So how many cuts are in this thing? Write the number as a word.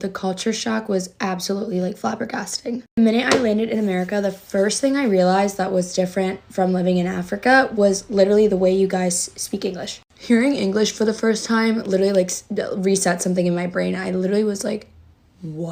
zero